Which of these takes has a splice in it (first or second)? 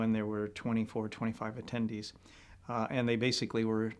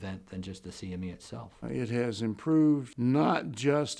second